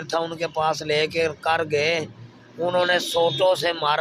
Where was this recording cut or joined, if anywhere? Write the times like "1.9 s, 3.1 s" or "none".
none